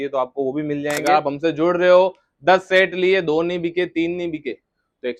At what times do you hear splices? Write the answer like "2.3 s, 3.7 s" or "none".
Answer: 1.0 s

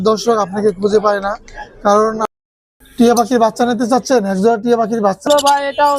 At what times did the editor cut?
2.2 s, 5.3 s

